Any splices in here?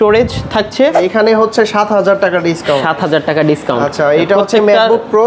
yes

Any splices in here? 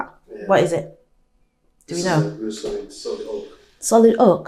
no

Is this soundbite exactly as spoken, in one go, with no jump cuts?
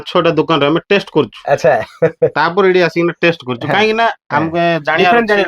yes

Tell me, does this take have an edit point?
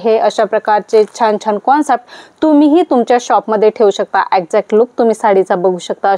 no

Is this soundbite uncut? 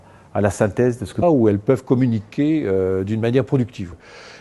yes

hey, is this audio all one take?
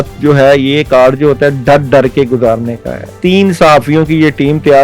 no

